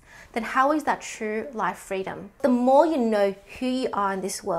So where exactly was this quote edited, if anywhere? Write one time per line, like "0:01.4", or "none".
0:02.4